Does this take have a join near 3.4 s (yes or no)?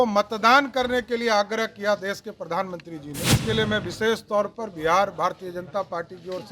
yes